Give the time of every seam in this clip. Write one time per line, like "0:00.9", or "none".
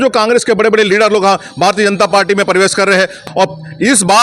0:03.2